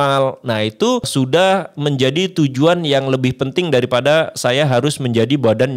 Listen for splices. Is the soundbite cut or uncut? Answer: cut